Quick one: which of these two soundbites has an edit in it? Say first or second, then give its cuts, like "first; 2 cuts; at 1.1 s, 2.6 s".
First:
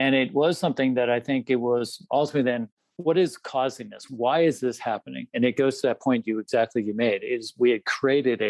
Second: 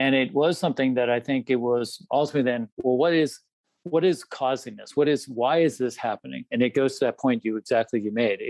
first; 2 cuts; at 2.7 s, 4.0 s